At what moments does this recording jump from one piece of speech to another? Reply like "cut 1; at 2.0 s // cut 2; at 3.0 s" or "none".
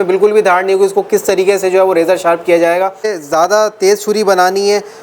cut 1; at 3.1 s